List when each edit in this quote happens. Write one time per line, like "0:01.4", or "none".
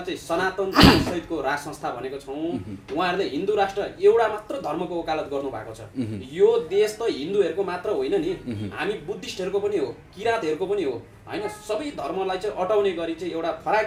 none

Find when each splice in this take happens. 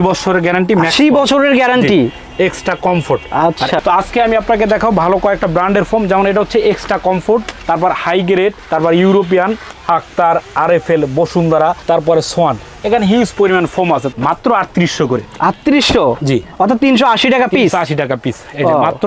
0:03.8
0:11.8
0:14.1

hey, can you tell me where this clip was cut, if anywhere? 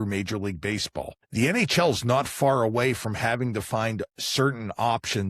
0:01.2

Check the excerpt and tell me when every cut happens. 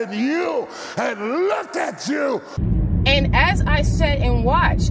0:02.6

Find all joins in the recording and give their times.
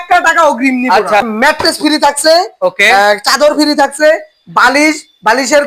0:01.3

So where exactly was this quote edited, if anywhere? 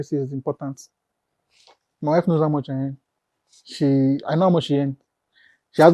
none

